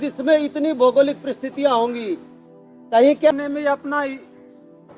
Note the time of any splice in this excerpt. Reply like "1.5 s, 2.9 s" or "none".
3.3 s